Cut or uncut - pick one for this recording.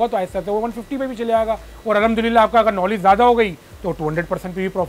uncut